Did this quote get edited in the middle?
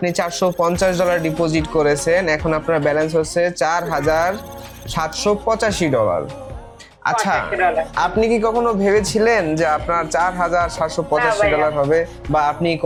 no; 0 cuts

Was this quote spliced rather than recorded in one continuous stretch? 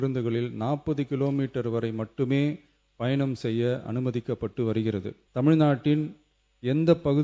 yes; 1 cut; at 5.2 s

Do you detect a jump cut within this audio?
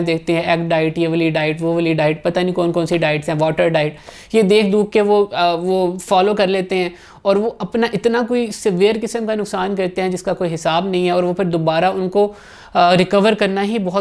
no; 0 cuts

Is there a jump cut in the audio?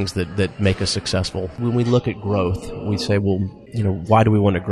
yes; 2 cuts; at 1.6 s, 3.6 s

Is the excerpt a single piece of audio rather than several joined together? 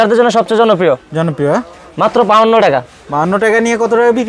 yes; 0 cuts

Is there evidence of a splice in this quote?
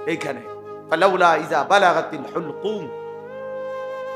no; 0 cuts

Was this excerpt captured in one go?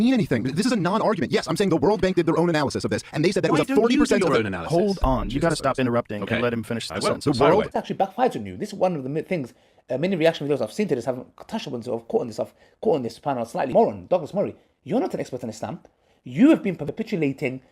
no; 3 cuts; at 7.7 s, 13.7 s, 16.8 s

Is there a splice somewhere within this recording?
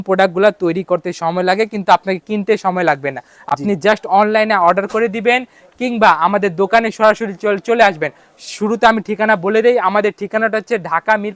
no; 0 cuts

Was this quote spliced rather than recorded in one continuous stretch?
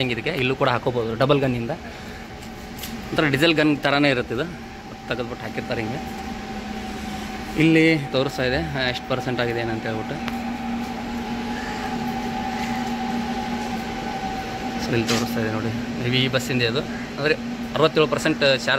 no; 0 cuts

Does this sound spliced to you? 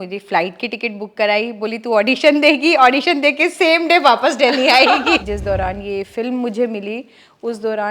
yes; 1 cut; at 5.2 s

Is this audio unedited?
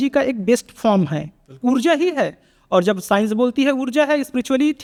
yes; 0 cuts

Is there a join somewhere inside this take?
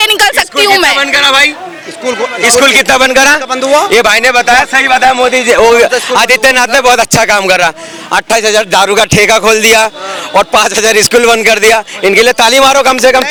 no; 0 cuts

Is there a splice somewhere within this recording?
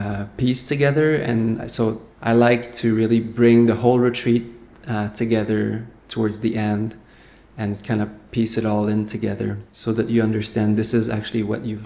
yes; 2 cuts; at 2.1 s, 9.7 s

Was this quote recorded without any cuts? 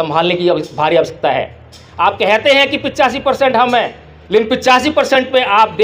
yes; 0 cuts

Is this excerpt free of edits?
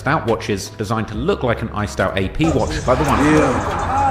no; 1 cut; at 3.2 s

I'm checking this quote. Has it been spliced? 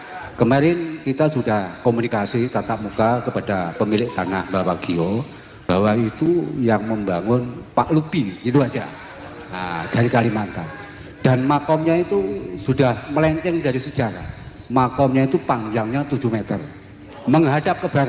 no; 0 cuts

